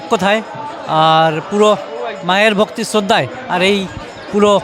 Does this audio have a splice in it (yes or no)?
no